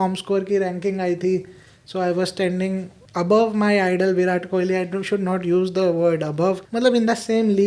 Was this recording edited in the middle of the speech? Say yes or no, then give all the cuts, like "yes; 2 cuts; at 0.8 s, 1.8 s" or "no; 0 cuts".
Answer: yes; 2 cuts; at 3.0 s, 6.6 s